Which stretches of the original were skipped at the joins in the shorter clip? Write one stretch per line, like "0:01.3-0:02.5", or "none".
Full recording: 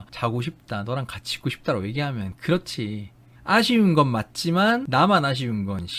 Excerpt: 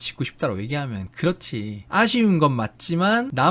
0:03.0-0:03.3